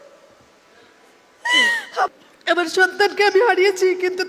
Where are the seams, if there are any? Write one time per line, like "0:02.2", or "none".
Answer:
0:02.1